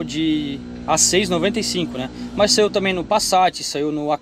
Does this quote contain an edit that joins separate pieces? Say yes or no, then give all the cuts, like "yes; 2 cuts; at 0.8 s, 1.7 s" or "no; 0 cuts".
no; 0 cuts